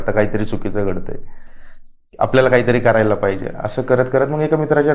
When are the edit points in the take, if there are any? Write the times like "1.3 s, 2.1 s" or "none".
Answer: none